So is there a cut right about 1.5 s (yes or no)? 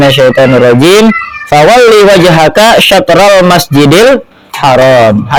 no